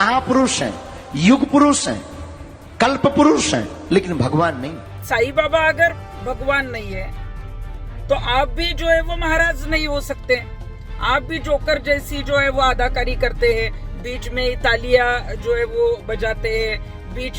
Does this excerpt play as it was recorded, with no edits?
no; 1 cut; at 4.9 s

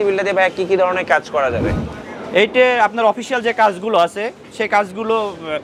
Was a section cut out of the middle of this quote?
no; 0 cuts

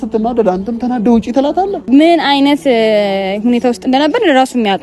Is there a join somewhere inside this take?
yes; 1 cut; at 1.8 s

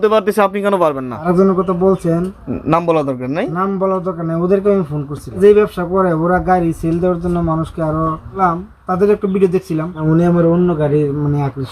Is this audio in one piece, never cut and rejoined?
no; 4 cuts; at 1.2 s, 5.4 s, 8.4 s, 10.0 s

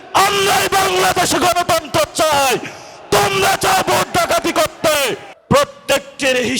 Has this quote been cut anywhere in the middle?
yes; 1 cut; at 5.3 s

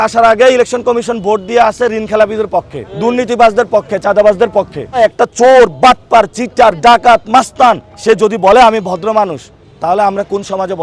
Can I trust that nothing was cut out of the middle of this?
no; 3 cuts; at 2.8 s, 5.0 s, 7.9 s

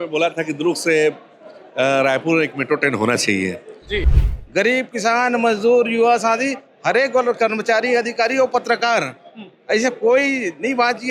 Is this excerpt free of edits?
no; 1 cut; at 4.2 s

